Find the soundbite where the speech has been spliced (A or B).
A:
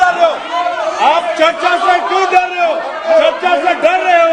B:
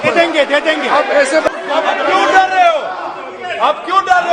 B